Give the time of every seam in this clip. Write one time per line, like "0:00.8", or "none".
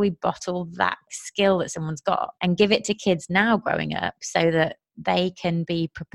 0:01.1
0:02.3